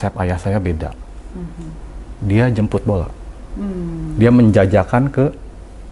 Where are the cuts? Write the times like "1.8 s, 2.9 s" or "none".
none